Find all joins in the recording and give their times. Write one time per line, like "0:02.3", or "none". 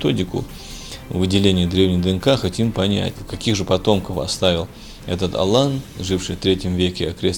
0:03.2